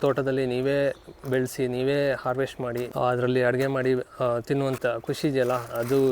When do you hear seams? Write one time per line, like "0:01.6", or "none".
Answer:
0:02.8
0:04.8